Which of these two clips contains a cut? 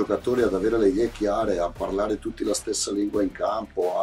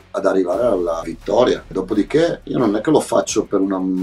second; 2 cuts; at 1.1 s, 2.4 s

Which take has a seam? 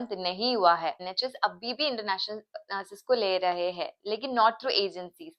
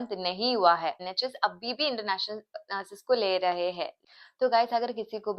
second; 1 cut; at 3.9 s

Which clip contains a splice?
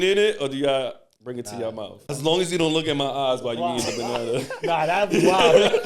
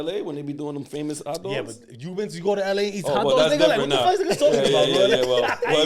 first; 1 cut; at 2.0 s

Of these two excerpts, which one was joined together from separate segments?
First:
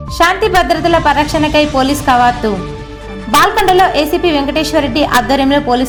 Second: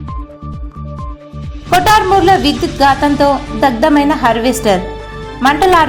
second; 1 cut; at 0.9 s

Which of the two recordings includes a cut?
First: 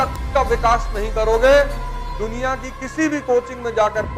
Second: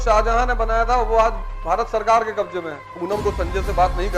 second; 1 cut; at 2.8 s

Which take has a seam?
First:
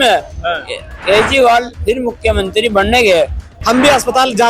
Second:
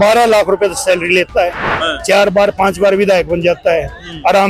first; 1 cut; at 3.4 s

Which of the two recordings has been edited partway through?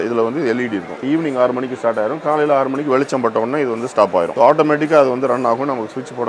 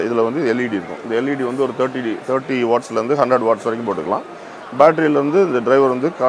first; 2 cuts; at 1.0 s, 4.3 s

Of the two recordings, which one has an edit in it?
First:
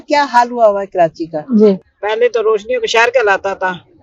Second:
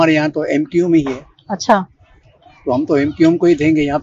first; 1 cut; at 1.9 s

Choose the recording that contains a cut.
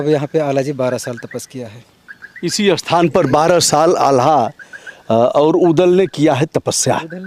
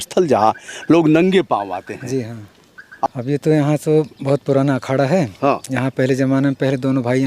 second; 1 cut; at 3.1 s

